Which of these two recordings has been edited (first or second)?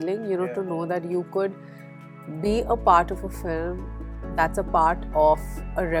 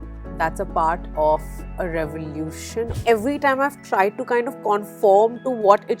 second